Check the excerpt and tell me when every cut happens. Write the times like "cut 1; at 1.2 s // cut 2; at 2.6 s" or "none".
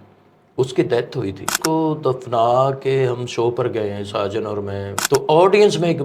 cut 1; at 1.6 s // cut 2; at 4.9 s

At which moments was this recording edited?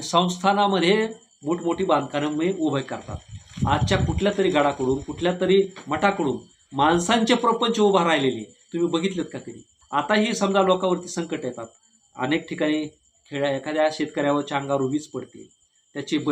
none

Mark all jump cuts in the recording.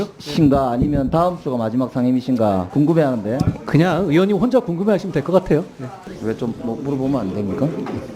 cut 1; at 2.7 s // cut 2; at 6.0 s

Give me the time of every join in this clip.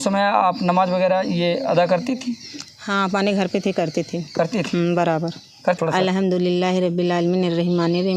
cut 1; at 5.8 s

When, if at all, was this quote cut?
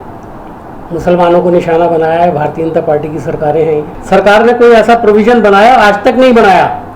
cut 1; at 3.9 s

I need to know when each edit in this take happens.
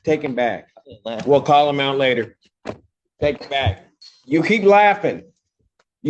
none

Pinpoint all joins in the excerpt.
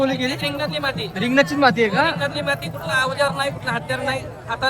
none

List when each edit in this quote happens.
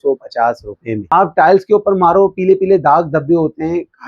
cut 1; at 0.9 s

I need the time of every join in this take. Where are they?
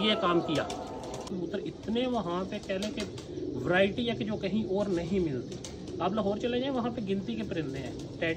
cut 1; at 1.3 s

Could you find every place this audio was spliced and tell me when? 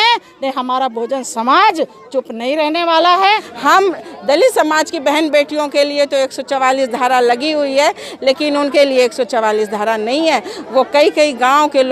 cut 1; at 3.5 s

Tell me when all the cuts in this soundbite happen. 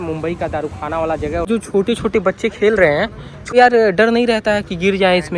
cut 1; at 1.5 s // cut 2; at 3.5 s

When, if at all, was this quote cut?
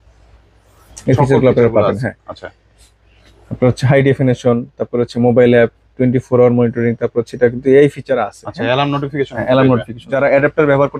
cut 1; at 10.0 s

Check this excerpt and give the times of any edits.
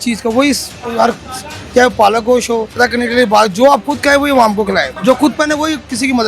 cut 1; at 2.8 s // cut 2; at 4.9 s

